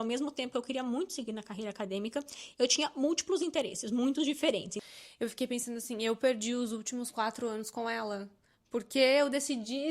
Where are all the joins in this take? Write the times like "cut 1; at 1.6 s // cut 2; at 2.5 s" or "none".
cut 1; at 4.8 s

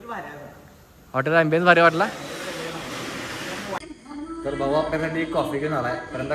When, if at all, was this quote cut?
cut 1; at 3.8 s

